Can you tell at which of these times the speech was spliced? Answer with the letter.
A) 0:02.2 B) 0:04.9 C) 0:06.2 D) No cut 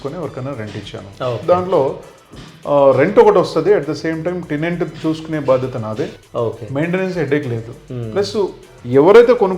C